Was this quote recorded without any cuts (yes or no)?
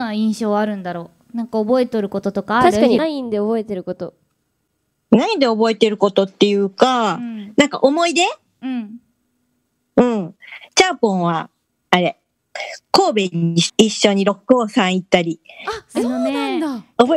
no